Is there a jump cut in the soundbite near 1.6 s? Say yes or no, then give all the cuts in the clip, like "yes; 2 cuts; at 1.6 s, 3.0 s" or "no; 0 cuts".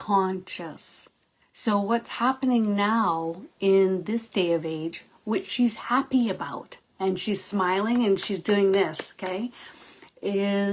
no; 0 cuts